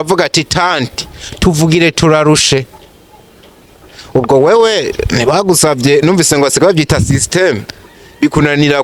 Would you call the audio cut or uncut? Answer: uncut